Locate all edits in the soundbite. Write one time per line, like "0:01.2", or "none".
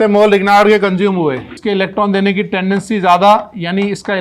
0:01.5